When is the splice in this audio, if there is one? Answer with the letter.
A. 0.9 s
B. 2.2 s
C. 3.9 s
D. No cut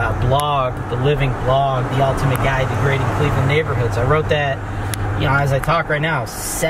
D